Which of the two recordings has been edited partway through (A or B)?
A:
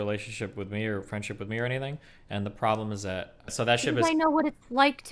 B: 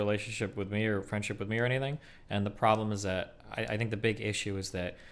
A